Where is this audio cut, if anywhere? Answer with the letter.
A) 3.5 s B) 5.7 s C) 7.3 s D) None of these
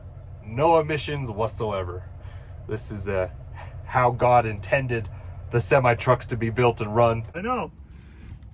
C